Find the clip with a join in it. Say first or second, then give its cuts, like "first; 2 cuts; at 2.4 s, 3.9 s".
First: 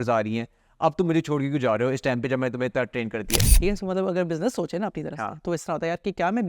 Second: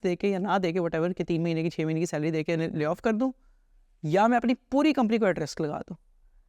first; 1 cut; at 3.5 s